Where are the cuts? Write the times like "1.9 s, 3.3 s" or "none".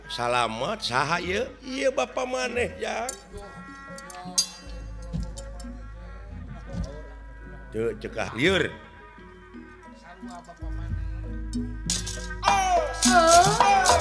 8.3 s